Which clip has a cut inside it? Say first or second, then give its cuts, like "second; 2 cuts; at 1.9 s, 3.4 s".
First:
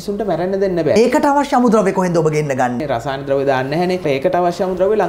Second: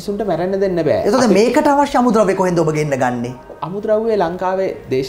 first; 3 cuts; at 1.0 s, 2.8 s, 4.0 s